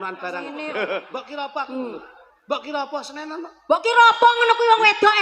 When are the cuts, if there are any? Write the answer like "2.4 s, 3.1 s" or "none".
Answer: 1.1 s